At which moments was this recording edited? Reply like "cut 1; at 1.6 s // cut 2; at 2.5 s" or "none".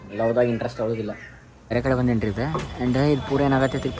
cut 1; at 1.7 s

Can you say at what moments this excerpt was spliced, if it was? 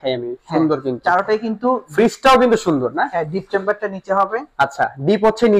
none

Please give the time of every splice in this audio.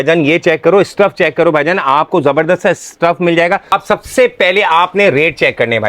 cut 1; at 3.7 s

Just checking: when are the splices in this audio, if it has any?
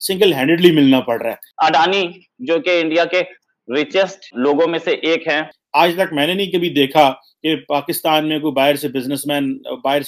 cut 1; at 1.4 s // cut 2; at 4.3 s // cut 3; at 5.6 s

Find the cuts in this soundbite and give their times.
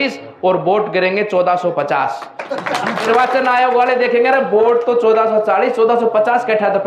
cut 1; at 3.0 s

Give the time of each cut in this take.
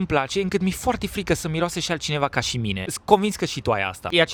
none

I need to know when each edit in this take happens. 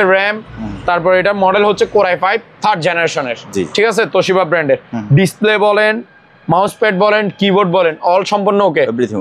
none

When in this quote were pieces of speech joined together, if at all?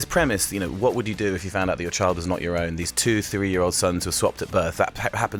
none

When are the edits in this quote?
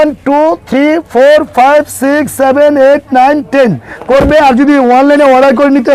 cut 1; at 3.9 s

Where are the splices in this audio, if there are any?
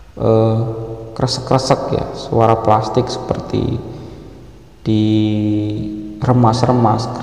none

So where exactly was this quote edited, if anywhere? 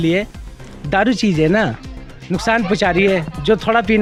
none

